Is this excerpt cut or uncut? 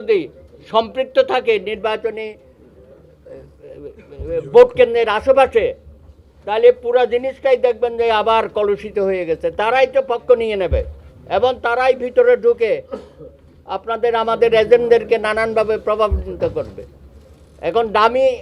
uncut